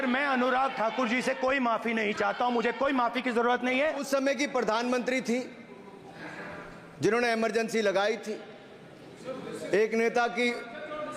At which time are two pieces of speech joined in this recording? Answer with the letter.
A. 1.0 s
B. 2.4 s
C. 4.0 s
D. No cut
C